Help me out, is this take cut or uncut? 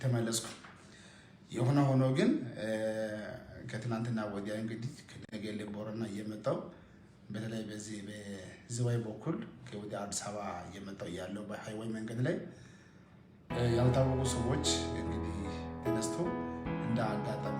uncut